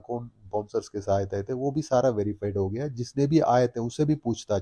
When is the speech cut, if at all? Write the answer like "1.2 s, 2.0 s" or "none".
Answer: none